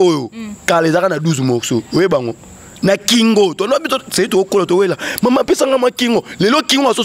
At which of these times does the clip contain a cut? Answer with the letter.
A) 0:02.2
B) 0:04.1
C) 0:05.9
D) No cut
D